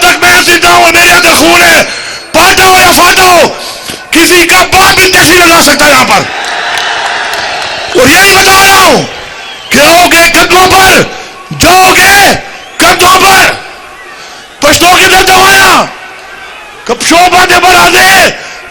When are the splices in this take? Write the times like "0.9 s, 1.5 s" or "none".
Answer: none